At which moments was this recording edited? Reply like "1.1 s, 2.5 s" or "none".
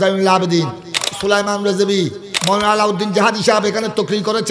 1.0 s, 2.3 s